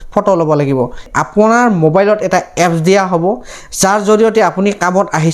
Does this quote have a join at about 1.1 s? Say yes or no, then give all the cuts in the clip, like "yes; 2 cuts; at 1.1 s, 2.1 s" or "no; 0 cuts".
yes; 1 cut; at 1.1 s